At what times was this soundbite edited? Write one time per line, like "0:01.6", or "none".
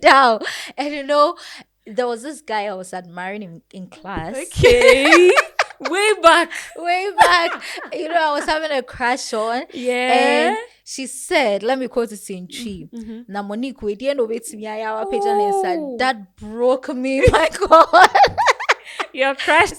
none